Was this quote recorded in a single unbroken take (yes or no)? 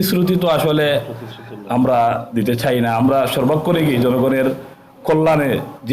yes